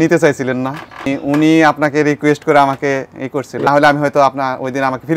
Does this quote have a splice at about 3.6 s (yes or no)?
yes